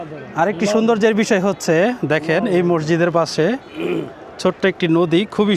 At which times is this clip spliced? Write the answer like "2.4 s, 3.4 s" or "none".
none